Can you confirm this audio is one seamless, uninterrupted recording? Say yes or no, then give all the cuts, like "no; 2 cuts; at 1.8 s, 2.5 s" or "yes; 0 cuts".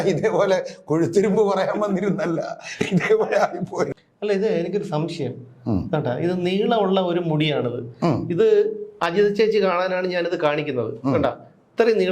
no; 1 cut; at 3.9 s